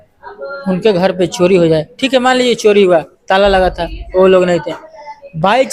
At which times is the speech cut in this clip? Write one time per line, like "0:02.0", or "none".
none